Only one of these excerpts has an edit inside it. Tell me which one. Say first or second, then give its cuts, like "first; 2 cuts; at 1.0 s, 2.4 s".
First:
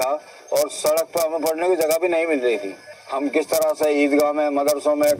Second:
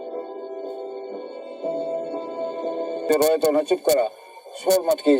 second; 1 cut; at 3.1 s